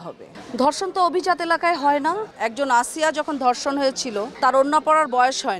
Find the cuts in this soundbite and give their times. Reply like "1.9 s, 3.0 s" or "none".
2.3 s, 4.3 s